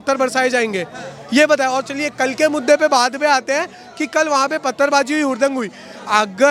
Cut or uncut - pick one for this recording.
uncut